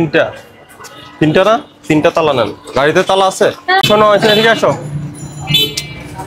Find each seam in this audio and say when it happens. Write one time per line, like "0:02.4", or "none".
0:03.8